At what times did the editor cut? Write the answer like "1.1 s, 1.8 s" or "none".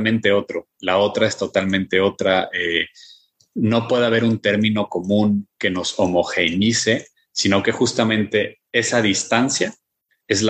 none